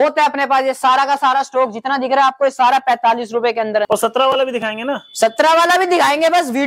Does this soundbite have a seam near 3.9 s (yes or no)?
yes